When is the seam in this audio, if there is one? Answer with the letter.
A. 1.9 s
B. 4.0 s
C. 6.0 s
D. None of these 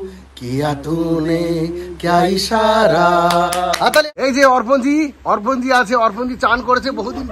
B